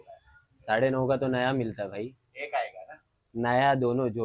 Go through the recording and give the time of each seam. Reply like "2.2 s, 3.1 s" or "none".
none